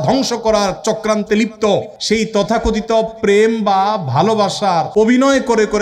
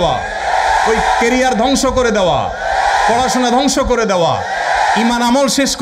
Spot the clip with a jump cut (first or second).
first